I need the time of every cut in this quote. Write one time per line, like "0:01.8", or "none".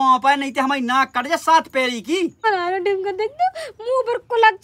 0:02.4